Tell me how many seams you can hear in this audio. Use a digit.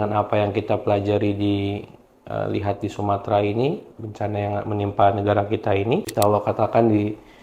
1